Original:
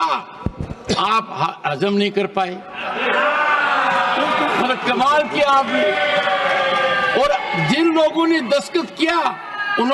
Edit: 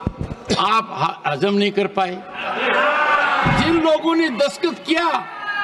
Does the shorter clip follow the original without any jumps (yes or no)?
no